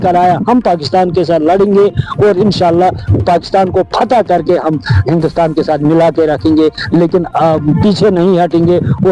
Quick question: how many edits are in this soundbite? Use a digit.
0